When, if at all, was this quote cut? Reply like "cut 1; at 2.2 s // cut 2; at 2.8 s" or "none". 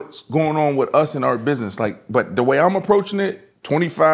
none